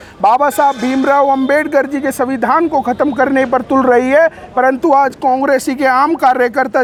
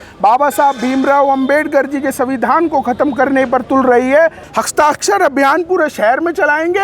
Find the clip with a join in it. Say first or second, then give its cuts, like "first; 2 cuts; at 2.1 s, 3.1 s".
second; 1 cut; at 4.4 s